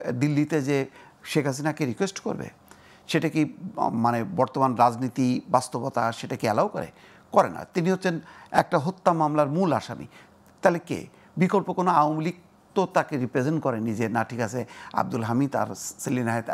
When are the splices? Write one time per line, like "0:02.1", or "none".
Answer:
none